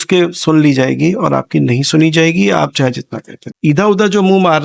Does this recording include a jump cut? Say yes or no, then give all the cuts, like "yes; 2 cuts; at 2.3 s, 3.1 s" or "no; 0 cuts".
yes; 1 cut; at 3.4 s